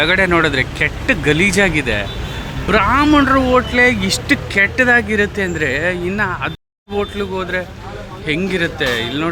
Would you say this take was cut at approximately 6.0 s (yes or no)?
no